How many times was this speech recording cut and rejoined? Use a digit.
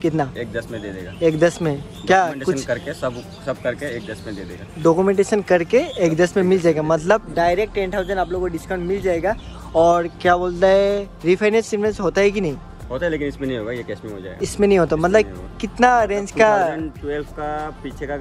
0